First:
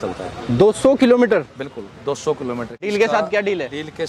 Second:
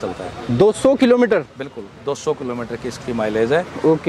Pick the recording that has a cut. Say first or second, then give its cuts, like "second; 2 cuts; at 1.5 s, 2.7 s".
first; 1 cut; at 2.9 s